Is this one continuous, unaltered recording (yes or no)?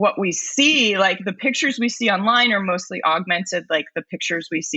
yes